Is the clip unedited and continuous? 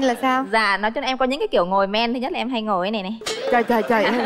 yes; 0 cuts

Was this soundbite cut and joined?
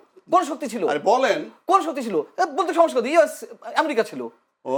no; 0 cuts

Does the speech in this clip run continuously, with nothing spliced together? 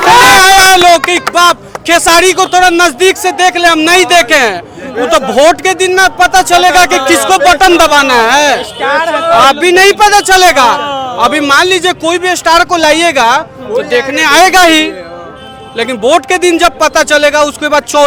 yes; 0 cuts

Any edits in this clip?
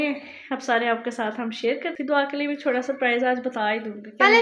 yes; 1 cut; at 1.9 s

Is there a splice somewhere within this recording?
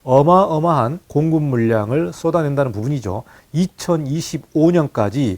yes; 1 cut; at 1.0 s

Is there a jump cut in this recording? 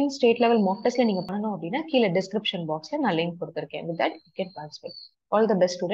yes; 1 cut; at 1.3 s

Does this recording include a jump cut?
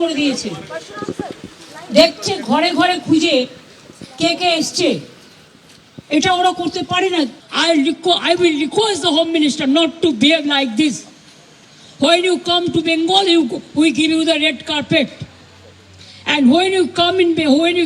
yes; 1 cut; at 7.4 s

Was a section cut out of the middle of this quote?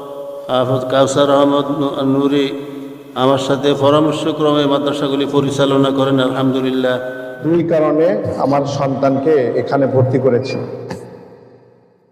yes; 1 cut; at 7.4 s

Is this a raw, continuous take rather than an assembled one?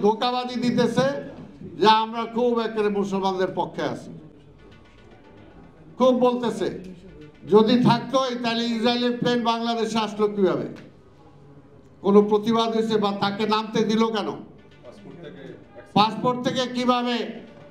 yes; 0 cuts

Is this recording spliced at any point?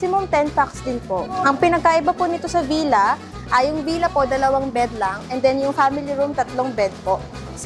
no; 0 cuts

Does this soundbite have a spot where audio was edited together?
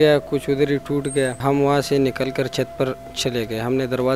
yes; 1 cut; at 1.4 s

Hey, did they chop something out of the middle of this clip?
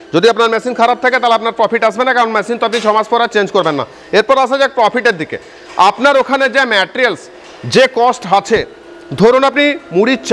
no; 0 cuts

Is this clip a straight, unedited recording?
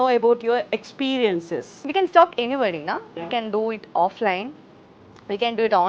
no; 1 cut; at 1.8 s

